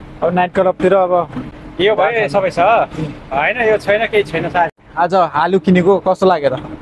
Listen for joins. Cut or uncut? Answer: cut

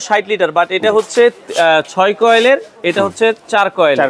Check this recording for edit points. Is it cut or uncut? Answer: uncut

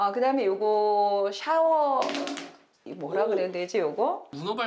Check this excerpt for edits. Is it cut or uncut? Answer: uncut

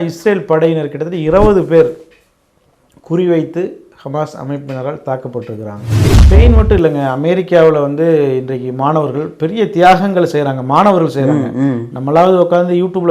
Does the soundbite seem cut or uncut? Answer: cut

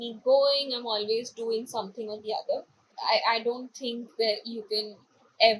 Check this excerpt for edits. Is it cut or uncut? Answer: cut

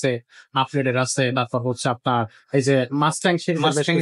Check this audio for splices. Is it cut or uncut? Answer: uncut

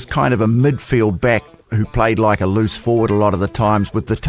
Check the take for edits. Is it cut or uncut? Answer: uncut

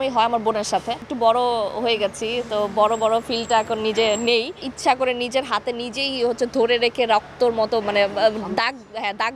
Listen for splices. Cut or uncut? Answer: cut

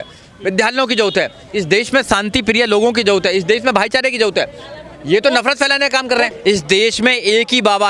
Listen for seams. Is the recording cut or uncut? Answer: cut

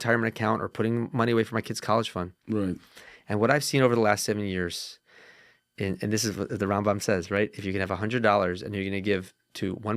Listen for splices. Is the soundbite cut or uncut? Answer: uncut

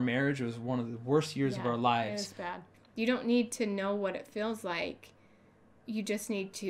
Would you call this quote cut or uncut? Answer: cut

